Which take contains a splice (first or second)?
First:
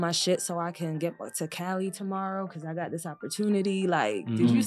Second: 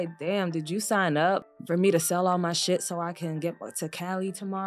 second